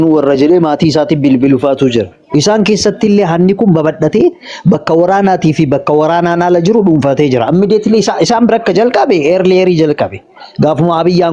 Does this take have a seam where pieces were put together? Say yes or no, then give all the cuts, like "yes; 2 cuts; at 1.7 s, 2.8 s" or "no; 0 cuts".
no; 0 cuts